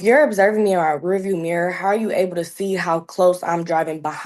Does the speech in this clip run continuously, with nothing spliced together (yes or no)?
yes